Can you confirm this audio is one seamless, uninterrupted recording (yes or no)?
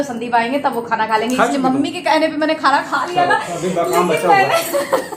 yes